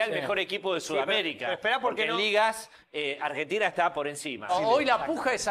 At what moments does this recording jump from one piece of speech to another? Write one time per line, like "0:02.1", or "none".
0:04.5